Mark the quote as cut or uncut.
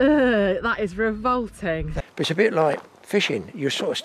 cut